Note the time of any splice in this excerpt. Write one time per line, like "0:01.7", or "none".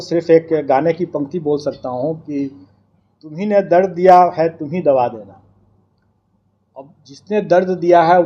none